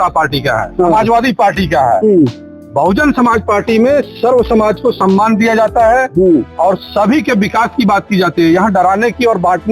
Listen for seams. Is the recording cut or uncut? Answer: uncut